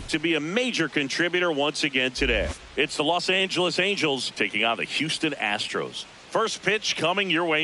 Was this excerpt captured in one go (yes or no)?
no